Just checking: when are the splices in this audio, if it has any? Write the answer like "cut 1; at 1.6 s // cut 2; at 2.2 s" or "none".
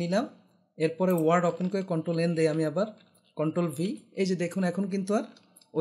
none